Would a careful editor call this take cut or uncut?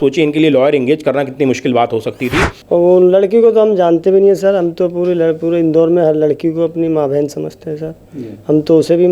cut